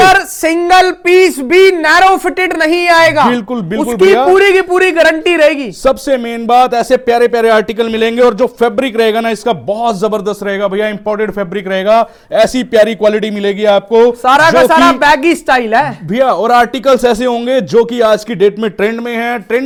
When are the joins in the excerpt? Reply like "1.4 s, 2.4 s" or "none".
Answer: none